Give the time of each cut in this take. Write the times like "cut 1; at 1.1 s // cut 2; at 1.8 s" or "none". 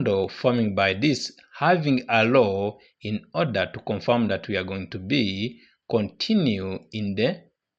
none

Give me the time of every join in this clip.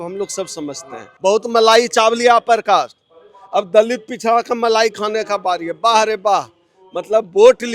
cut 1; at 1.1 s

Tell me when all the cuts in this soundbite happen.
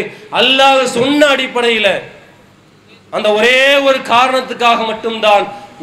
none

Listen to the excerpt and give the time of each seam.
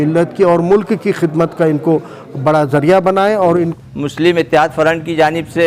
cut 1; at 3.7 s

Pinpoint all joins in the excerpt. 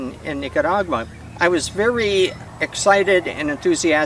cut 1; at 1.2 s // cut 2; at 2.4 s

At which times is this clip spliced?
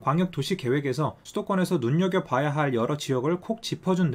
cut 1; at 1.2 s

